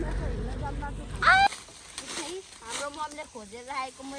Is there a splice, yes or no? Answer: yes